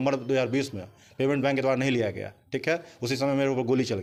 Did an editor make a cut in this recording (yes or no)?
no